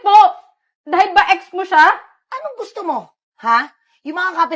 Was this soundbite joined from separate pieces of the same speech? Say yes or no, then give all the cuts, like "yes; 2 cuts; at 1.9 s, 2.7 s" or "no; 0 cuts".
yes; 1 cut; at 2.2 s